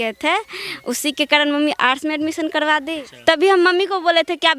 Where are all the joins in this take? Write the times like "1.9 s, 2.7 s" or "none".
3.0 s